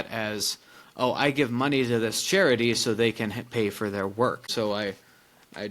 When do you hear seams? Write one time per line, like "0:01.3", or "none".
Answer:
0:04.5